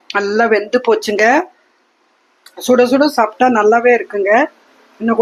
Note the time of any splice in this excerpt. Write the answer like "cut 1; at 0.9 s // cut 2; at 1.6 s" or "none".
none